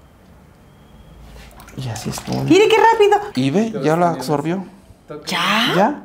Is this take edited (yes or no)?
yes